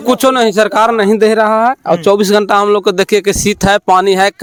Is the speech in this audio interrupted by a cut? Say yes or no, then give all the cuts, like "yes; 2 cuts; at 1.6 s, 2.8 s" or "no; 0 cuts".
no; 0 cuts